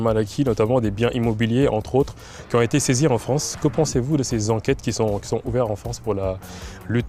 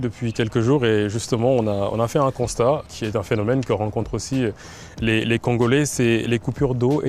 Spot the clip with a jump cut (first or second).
second